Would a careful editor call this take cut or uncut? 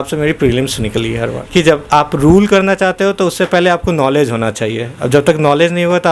cut